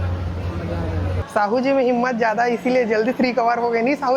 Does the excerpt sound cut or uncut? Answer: cut